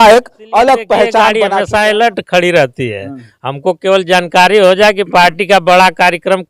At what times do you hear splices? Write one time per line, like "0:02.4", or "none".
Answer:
0:01.5